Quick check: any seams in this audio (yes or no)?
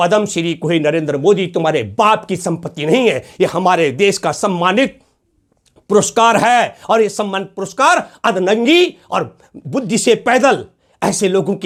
no